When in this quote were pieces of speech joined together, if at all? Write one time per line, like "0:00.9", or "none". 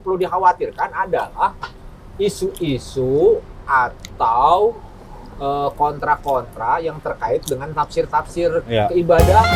none